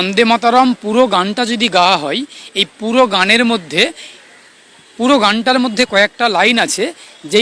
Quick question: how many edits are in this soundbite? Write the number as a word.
zero